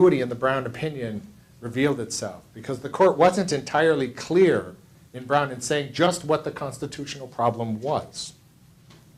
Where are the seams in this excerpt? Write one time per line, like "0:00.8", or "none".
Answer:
none